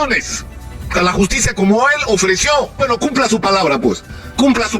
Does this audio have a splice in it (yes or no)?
yes